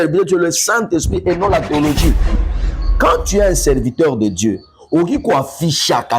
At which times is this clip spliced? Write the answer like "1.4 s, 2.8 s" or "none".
2.6 s